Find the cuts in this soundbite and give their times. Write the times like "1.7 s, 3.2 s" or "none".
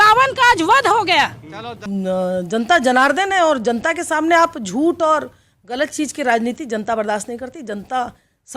1.8 s

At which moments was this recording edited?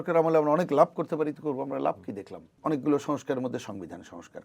2.5 s

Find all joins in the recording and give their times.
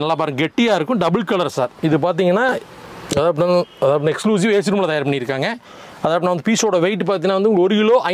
none

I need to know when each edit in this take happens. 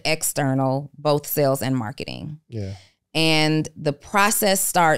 none

